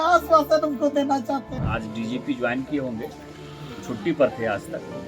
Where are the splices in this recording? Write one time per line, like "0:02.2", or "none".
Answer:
0:01.5